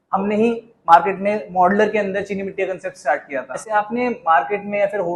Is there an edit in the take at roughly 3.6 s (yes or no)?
yes